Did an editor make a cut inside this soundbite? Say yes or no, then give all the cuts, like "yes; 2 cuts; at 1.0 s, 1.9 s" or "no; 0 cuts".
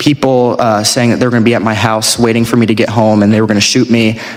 no; 0 cuts